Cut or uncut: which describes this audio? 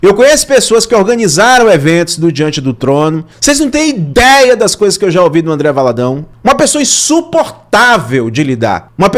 uncut